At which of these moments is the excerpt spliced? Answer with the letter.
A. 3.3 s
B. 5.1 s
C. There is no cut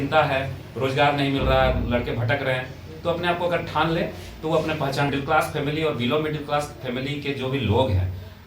B